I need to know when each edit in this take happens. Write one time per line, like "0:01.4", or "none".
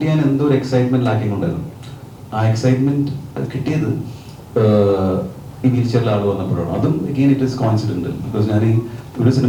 none